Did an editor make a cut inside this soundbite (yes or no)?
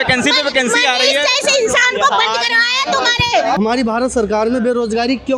yes